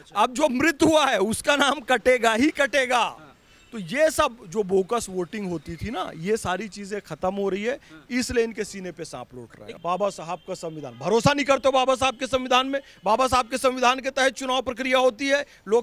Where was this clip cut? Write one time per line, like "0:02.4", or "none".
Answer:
0:09.8